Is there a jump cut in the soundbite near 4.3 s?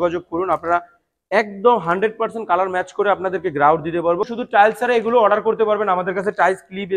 yes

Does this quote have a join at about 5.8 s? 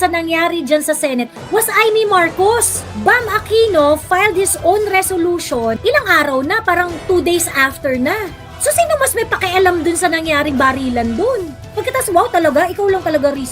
yes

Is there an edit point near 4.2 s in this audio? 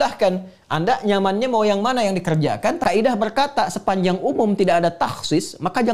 no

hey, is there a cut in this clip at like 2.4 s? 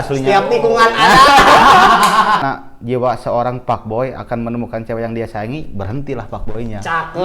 yes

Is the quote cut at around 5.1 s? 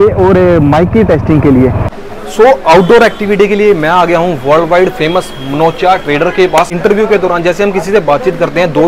no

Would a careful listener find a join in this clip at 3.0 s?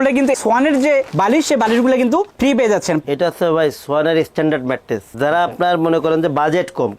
yes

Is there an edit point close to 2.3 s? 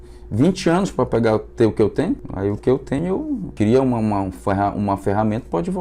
yes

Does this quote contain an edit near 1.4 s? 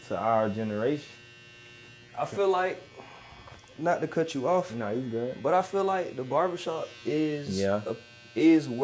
no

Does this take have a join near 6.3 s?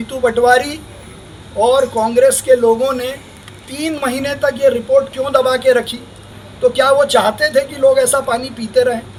no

